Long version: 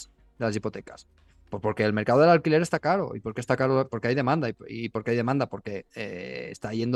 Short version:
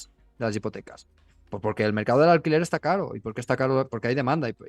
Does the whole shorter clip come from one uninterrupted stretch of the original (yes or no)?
yes